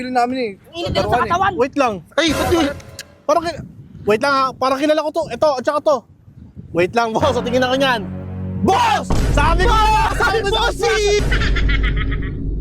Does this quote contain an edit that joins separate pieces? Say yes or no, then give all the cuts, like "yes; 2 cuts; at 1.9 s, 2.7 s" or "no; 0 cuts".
yes; 1 cut; at 11.2 s